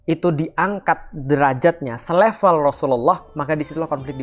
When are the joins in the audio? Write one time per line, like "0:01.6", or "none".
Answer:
none